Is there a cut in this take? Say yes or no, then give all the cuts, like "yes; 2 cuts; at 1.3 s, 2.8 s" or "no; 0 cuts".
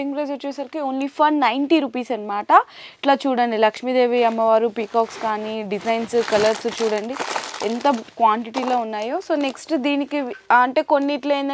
no; 0 cuts